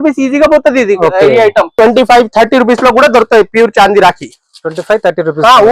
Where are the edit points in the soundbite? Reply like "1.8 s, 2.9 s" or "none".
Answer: 1.7 s